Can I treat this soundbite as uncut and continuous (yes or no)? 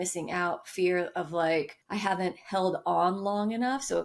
no